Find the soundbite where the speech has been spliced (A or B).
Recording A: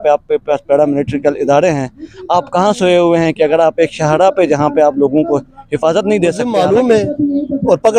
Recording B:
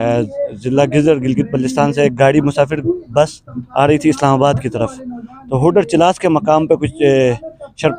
A